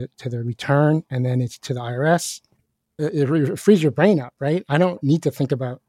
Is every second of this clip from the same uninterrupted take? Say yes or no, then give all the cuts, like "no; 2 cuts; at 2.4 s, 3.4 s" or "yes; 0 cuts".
no; 1 cut; at 2.9 s